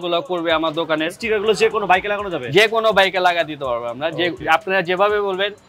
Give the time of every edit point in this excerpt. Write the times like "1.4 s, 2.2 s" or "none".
1.2 s

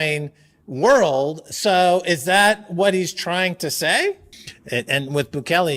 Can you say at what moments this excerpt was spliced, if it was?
4.3 s

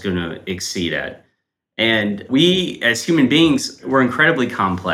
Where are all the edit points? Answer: 2.2 s, 3.8 s

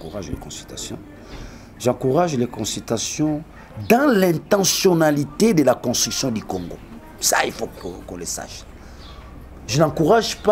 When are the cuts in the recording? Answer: none

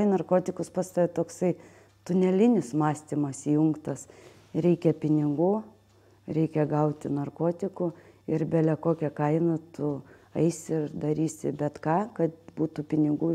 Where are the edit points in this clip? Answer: none

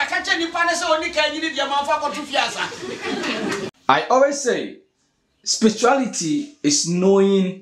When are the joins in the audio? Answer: 3.8 s

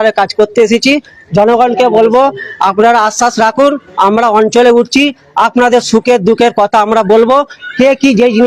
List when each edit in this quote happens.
none

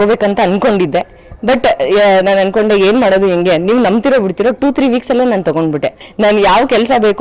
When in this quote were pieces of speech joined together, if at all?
6.0 s

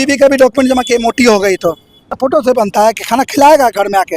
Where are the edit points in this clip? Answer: 2.1 s

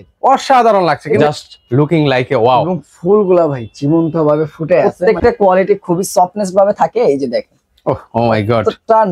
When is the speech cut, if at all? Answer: 1.2 s, 5.0 s

